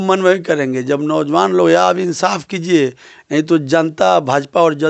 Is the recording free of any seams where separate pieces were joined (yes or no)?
yes